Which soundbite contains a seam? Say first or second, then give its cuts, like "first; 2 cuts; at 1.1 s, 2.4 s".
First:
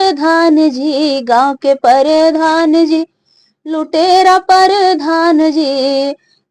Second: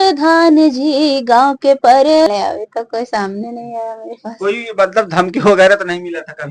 second; 1 cut; at 2.3 s